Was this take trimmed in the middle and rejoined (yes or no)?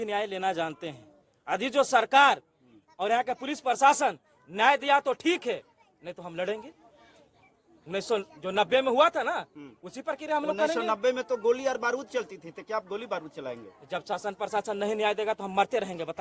no